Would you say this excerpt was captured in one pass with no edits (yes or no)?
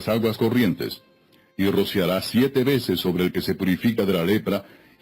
no